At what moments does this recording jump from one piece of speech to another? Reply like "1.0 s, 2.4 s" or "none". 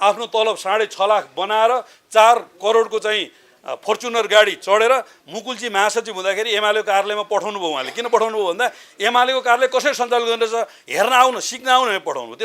5.2 s